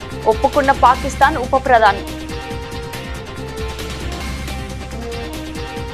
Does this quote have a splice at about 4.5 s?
no; 1 cut; at 2.0 s

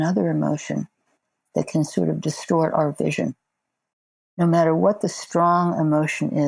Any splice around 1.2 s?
yes; 2 cuts; at 1.2 s, 4.4 s

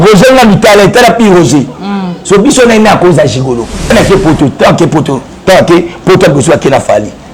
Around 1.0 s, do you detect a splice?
no; 1 cut; at 3.9 s

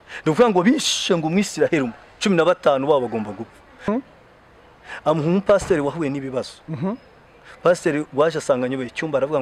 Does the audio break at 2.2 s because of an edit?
no; 1 cut; at 3.8 s

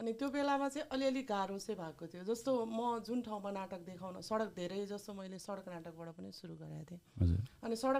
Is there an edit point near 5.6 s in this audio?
no; 0 cuts

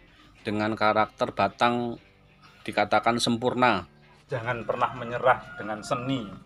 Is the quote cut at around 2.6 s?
no; 1 cut; at 4.3 s

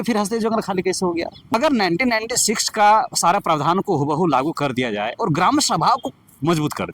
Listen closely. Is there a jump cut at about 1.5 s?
yes; 1 cut; at 1.5 s

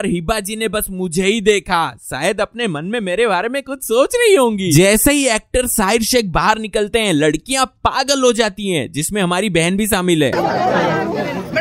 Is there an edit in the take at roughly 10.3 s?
yes; 2 cuts; at 4.7 s, 10.3 s

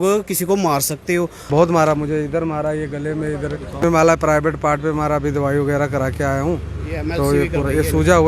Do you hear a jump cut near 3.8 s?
yes; 2 cuts; at 1.4 s, 3.8 s

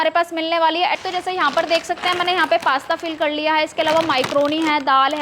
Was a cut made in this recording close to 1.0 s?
yes; 1 cut; at 1.0 s

